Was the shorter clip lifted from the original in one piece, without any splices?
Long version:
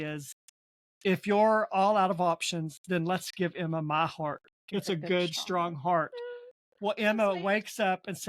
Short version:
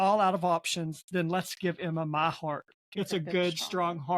yes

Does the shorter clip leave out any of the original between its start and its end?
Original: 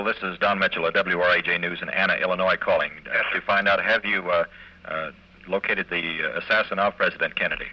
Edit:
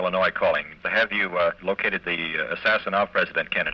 yes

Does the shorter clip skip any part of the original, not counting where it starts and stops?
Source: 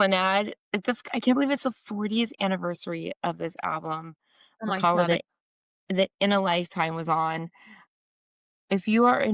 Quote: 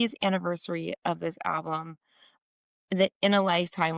yes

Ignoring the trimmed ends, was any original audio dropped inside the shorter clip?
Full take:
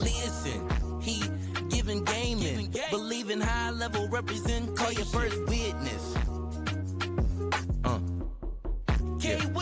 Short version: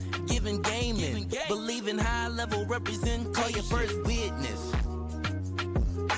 no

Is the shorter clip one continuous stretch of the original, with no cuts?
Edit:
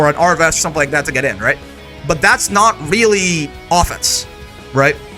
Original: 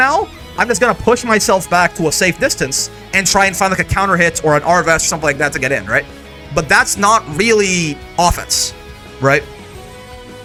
yes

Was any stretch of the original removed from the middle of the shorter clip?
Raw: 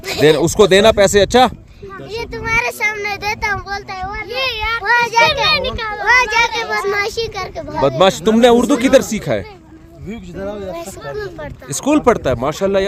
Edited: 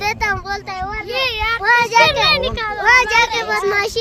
no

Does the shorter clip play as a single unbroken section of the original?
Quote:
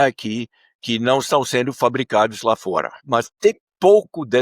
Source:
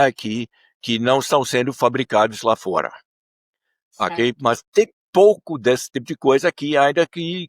no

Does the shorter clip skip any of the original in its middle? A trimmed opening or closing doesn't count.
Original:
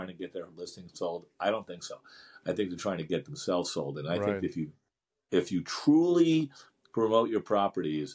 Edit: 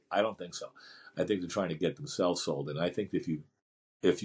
no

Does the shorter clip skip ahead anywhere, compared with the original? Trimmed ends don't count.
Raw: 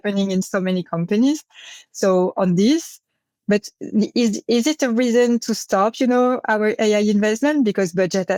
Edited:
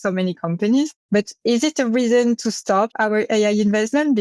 yes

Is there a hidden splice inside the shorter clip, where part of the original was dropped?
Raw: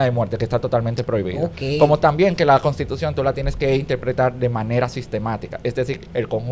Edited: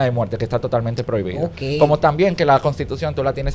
no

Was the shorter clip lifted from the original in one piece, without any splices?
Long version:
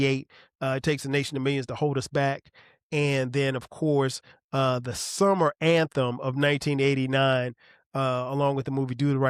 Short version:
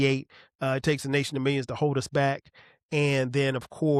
yes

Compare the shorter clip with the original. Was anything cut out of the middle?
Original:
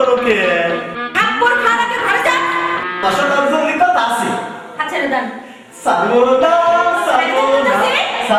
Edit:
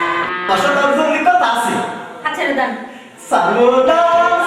no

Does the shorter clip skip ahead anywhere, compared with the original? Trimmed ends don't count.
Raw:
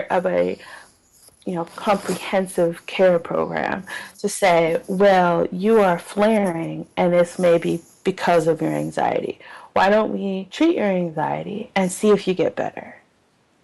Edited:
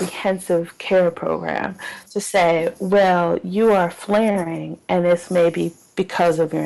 no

